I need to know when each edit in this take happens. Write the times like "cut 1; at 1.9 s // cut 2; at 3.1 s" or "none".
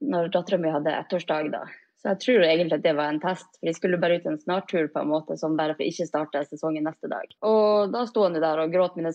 cut 1; at 7.3 s